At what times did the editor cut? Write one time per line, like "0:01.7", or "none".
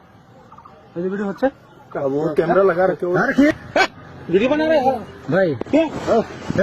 0:03.5